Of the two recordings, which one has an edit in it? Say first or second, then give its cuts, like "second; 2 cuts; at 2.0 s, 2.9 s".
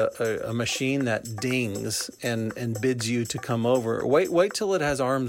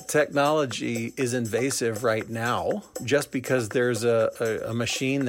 second; 1 cut; at 3.0 s